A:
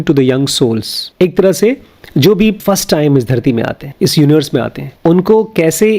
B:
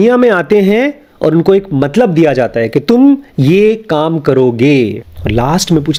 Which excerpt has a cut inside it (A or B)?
A